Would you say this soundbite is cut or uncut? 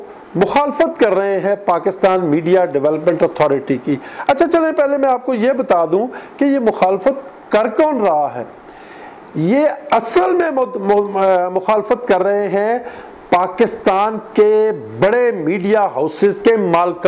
uncut